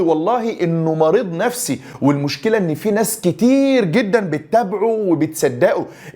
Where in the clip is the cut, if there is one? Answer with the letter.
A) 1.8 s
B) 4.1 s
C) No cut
C